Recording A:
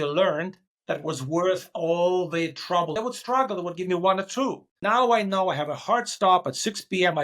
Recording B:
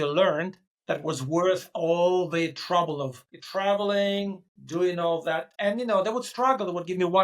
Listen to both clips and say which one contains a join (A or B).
A